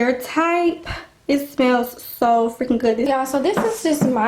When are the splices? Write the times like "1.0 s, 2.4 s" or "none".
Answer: 3.1 s